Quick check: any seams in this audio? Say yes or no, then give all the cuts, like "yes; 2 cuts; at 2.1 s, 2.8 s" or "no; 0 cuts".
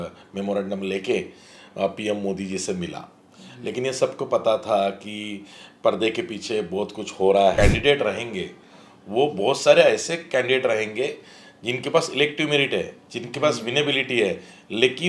yes; 1 cut; at 7.5 s